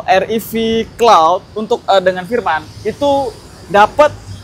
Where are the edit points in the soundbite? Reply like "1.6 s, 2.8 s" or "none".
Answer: none